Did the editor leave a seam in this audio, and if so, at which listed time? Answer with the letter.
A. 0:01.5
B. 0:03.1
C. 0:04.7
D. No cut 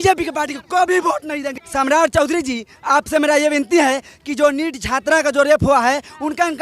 A